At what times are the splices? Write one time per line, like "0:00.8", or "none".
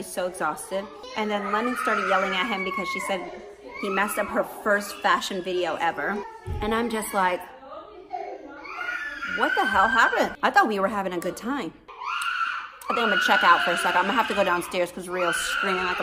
0:01.0
0:06.4
0:10.3
0:11.9

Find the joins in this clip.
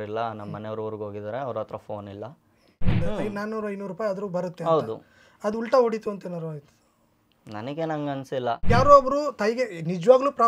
0:02.9
0:08.6

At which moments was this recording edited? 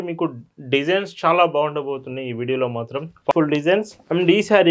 0:03.3

